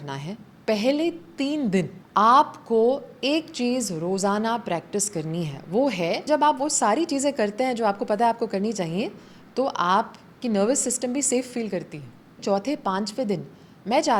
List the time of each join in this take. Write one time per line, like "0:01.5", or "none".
0:02.0
0:06.3
0:12.4